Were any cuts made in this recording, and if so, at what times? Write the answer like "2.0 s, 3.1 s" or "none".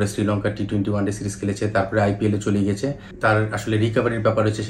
3.1 s

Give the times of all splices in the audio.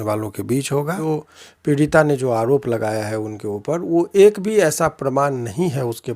1.0 s

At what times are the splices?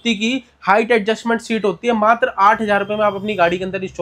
none

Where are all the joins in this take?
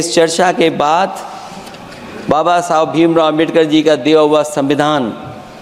none

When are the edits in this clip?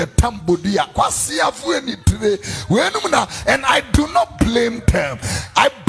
none

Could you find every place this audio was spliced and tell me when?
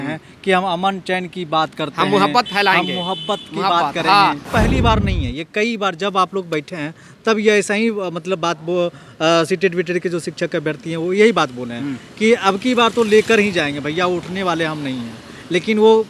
4.4 s

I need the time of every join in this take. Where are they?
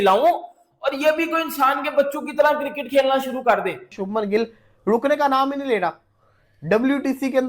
3.9 s

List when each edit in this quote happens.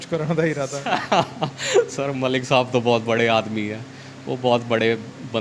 none

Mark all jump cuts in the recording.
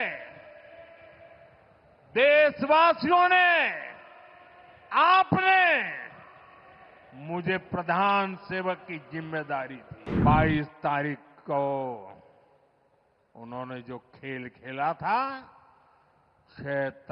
10.1 s

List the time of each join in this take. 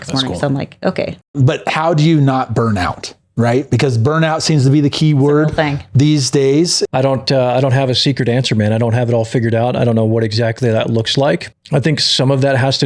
1.3 s, 6.8 s, 11.5 s

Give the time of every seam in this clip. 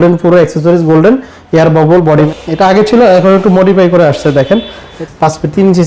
2.3 s, 4.9 s

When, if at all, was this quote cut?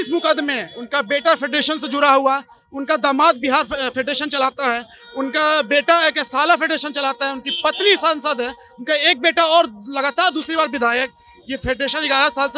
none

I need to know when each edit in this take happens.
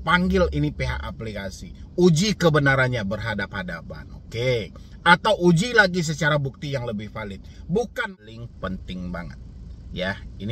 7.9 s

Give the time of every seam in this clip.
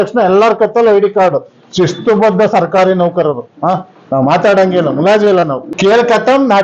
5.7 s

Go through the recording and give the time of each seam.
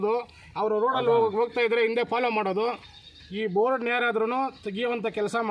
3.0 s

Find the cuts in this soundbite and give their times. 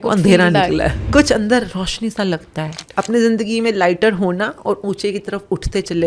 1.0 s, 2.8 s

